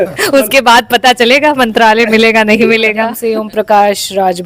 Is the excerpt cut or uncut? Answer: cut